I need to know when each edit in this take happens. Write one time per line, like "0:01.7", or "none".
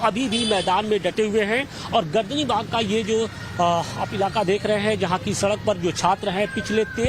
0:02.1